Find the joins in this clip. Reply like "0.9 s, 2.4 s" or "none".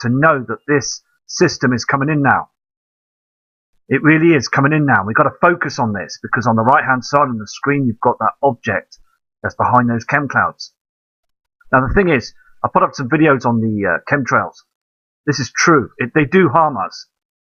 none